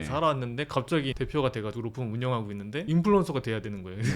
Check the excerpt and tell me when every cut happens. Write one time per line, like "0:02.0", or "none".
0:01.1